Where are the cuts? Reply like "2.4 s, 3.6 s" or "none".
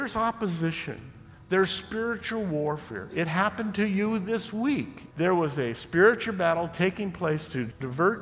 5.0 s